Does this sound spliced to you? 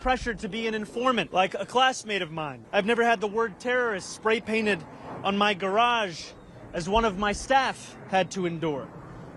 yes; 2 cuts; at 1.3 s, 2.5 s

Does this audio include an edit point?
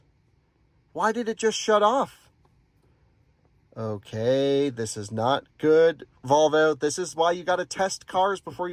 no; 0 cuts

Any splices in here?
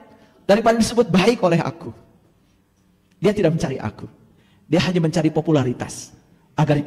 no; 0 cuts

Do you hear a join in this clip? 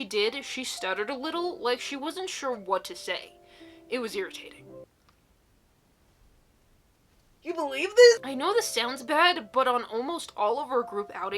no; 0 cuts

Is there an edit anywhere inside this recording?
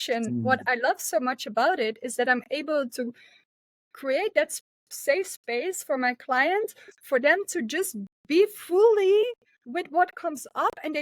no; 0 cuts

